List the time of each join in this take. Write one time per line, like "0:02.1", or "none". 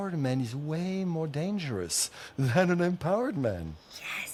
none

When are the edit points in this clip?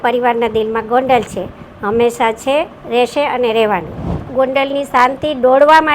0:04.2

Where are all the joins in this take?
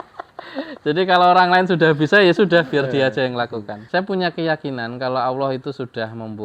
0:03.8

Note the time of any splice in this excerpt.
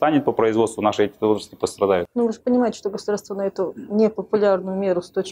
0:02.1

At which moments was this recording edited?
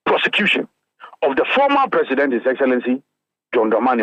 none

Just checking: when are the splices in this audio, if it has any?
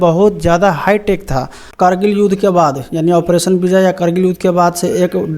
0:01.8

